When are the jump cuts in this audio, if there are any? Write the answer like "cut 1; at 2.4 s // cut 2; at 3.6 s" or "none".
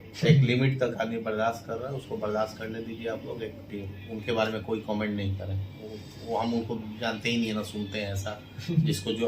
cut 1; at 3.7 s